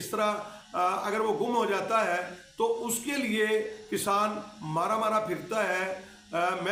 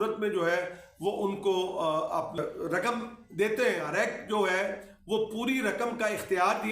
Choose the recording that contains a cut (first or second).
second